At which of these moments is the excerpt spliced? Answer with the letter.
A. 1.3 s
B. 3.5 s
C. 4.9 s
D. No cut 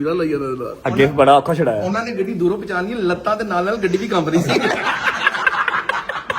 C